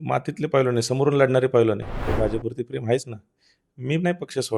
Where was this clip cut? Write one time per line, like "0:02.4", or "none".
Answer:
0:02.1